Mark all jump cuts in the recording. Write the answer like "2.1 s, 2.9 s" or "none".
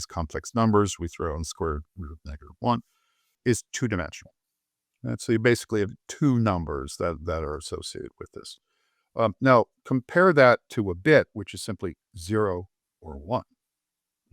3.4 s

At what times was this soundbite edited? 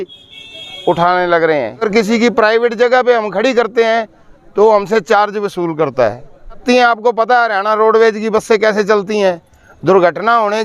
1.8 s, 6.6 s

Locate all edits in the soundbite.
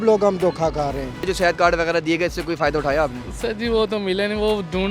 1.3 s

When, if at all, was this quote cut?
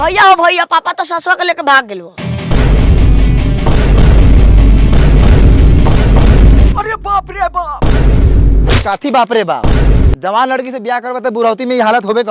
6.7 s

